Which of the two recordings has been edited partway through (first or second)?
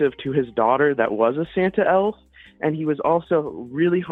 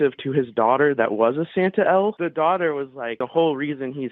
second